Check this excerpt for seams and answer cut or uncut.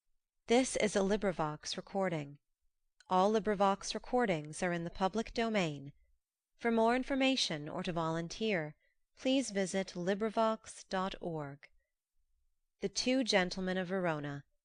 uncut